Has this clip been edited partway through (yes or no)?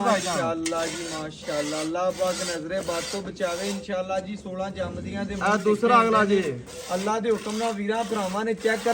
no